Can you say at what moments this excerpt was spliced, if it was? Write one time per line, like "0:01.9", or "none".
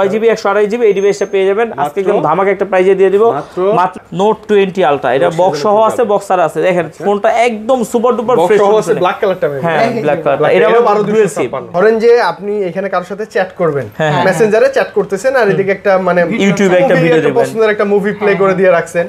0:03.9
0:11.6